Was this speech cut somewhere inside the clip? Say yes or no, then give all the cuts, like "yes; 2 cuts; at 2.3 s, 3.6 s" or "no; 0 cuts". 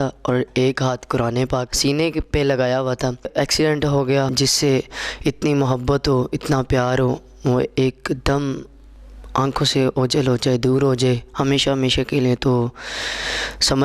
yes; 3 cuts; at 1.7 s, 3.3 s, 4.3 s